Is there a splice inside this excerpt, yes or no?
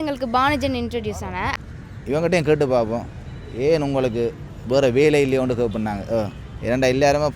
yes